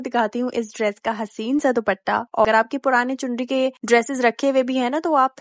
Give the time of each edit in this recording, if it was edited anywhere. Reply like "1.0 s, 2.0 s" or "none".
2.4 s